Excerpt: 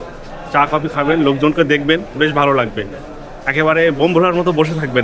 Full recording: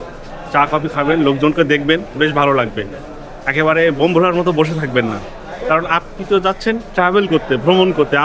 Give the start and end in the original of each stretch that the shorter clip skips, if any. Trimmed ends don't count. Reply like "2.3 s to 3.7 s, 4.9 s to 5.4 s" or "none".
none